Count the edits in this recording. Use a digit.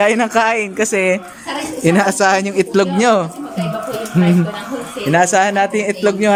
0